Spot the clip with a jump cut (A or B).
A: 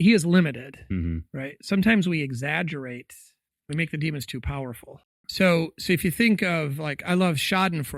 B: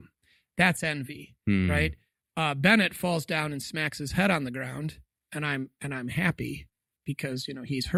A